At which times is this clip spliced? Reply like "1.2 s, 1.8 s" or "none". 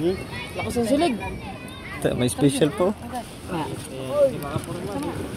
none